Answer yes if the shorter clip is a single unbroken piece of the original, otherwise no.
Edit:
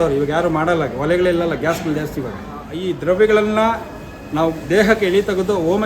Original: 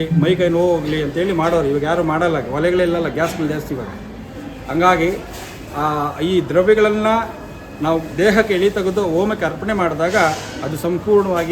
no